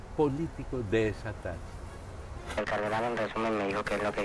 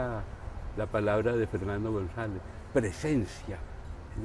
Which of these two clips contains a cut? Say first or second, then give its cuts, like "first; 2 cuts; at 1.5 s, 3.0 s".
first; 1 cut; at 2.5 s